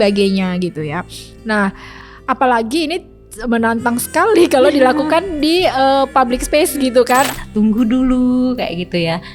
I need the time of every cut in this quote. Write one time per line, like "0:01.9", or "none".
0:07.3